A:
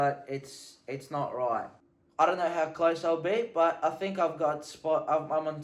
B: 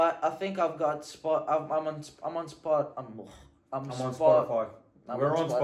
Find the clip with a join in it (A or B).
A